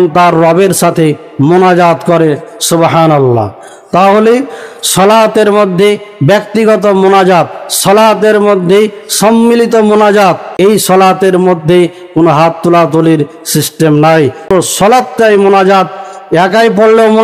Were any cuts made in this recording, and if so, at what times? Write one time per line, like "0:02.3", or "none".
0:10.5
0:14.5